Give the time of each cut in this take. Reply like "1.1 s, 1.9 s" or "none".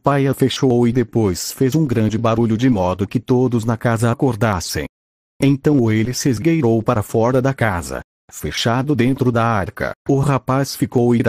8.0 s